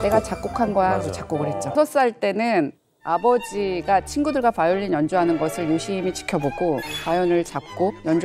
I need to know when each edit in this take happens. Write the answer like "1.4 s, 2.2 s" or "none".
none